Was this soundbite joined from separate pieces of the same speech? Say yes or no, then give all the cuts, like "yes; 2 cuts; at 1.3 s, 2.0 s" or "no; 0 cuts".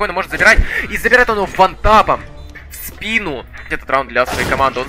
yes; 1 cut; at 3.8 s